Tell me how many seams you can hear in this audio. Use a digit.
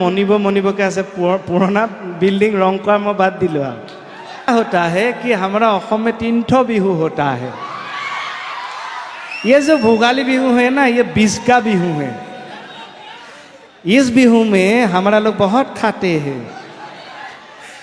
1